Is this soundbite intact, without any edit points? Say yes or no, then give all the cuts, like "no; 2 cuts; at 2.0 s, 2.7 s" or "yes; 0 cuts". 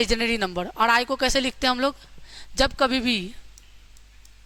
yes; 0 cuts